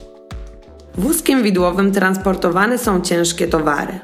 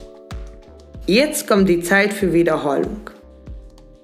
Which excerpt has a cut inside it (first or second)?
first